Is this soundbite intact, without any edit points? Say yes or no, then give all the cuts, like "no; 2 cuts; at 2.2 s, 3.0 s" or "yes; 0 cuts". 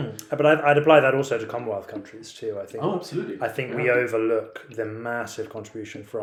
yes; 0 cuts